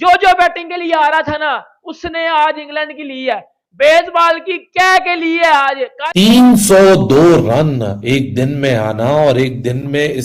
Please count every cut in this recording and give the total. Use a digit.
1